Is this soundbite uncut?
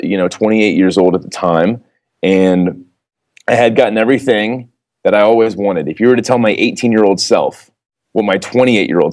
yes; 0 cuts

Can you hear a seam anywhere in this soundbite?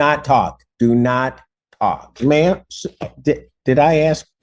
yes; 1 cut; at 2.1 s

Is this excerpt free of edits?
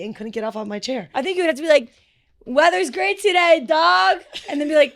no; 1 cut; at 1.3 s

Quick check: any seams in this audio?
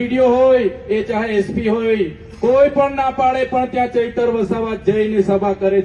no; 0 cuts

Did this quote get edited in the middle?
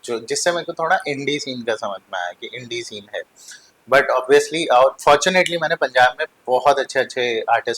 no; 0 cuts

